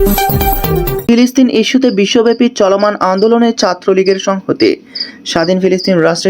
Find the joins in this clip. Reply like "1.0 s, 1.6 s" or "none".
1.1 s